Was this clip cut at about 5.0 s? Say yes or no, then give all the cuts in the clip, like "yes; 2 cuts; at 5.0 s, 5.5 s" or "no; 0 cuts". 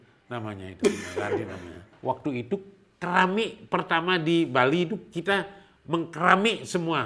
no; 1 cut; at 1.9 s